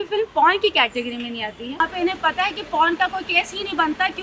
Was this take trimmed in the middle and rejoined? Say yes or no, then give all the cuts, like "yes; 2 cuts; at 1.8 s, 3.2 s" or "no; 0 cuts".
yes; 1 cut; at 1.8 s